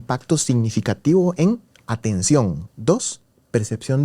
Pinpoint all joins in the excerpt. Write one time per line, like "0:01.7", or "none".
0:02.7